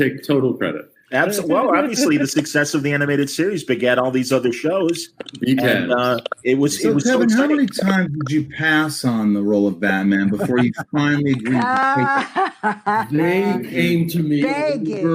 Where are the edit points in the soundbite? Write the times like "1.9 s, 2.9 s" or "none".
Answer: none